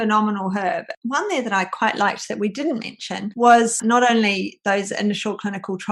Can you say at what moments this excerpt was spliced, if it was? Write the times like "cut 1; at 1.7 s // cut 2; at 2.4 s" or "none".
cut 1; at 0.9 s // cut 2; at 3.8 s